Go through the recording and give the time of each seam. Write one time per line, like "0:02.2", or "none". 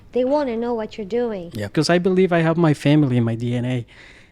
0:01.7